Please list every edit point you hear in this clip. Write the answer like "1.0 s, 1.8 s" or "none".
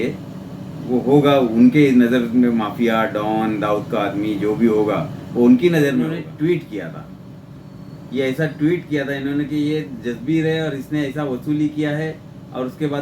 6.2 s